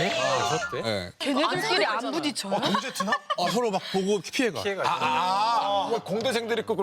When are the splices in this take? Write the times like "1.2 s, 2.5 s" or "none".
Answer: 1.1 s